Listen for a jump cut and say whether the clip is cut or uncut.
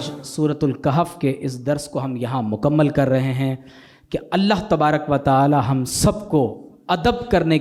uncut